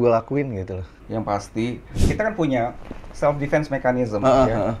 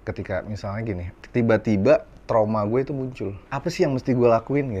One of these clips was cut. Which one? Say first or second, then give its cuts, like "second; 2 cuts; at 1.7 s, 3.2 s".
first; 1 cut; at 1.9 s